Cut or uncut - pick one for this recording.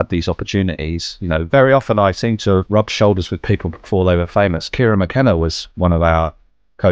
cut